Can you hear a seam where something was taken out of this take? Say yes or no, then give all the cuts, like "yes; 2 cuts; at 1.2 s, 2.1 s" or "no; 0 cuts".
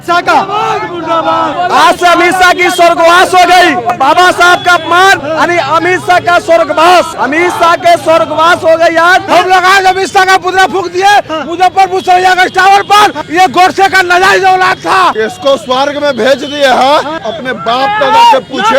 yes; 8 cuts; at 1.5 s, 3.9 s, 5.2 s, 7.1 s, 9.2 s, 13.2 s, 15.1 s, 17.3 s